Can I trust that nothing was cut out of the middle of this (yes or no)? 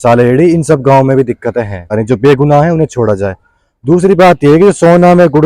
no